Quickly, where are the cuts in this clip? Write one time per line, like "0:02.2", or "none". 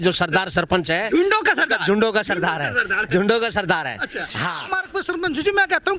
0:04.7